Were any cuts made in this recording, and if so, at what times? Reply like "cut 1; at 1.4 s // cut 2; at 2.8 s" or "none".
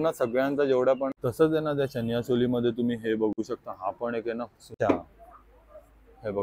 cut 1; at 1.2 s // cut 2; at 4.8 s